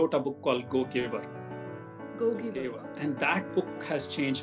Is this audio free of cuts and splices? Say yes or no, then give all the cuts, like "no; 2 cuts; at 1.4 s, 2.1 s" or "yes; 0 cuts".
no; 1 cut; at 2.6 s